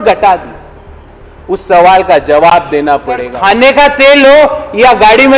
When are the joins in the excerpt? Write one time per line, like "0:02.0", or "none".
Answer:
0:03.3